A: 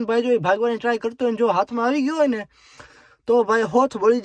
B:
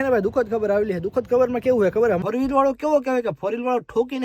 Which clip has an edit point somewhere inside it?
B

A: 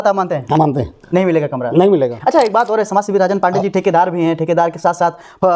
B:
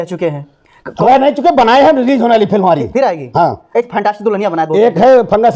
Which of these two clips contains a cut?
A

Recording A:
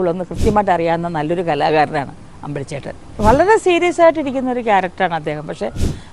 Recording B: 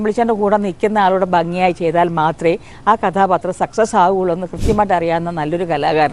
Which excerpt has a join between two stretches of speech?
A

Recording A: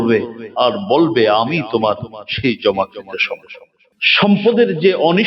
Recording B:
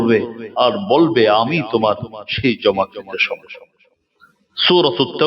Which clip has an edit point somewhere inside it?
A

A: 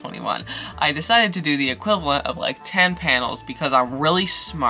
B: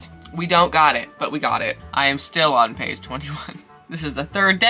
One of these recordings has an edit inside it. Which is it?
B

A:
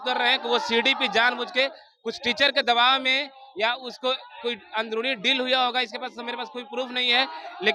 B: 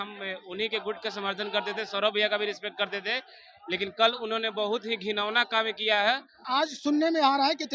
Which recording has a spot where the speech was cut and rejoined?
B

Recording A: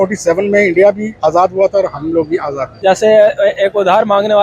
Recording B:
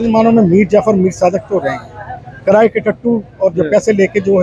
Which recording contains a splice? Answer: A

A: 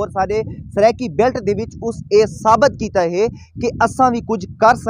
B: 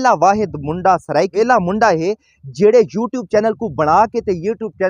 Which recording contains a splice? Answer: B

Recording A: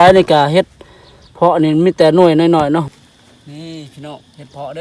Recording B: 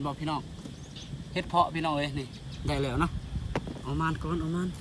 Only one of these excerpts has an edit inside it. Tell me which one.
A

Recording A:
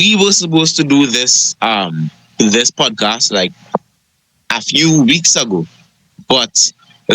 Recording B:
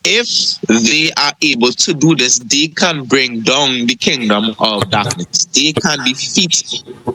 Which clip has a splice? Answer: A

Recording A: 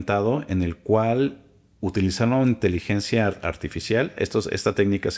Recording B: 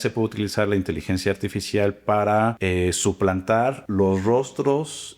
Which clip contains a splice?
B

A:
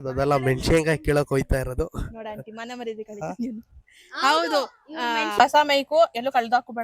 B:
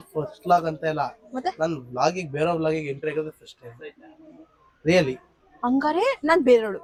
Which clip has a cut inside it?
A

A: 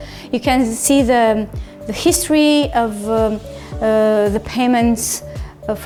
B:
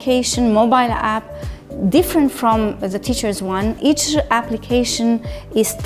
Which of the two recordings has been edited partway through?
B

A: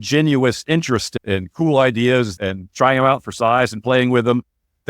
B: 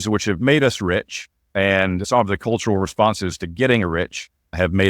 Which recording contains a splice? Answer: A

